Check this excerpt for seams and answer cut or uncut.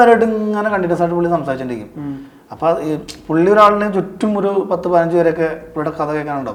uncut